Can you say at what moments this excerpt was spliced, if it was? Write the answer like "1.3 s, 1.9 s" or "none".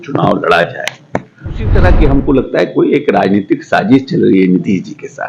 1.7 s